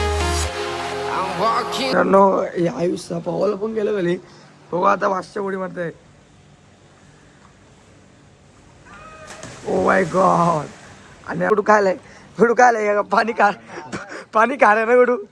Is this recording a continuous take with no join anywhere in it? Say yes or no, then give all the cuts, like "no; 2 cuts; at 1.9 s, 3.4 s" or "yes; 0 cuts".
no; 2 cuts; at 1.9 s, 11.5 s